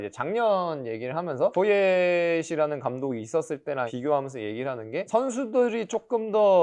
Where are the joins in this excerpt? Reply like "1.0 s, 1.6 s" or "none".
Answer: 1.5 s, 3.9 s, 5.1 s